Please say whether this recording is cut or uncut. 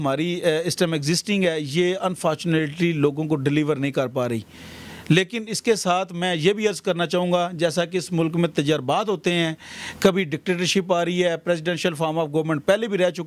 uncut